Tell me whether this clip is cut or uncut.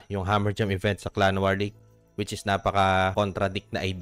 uncut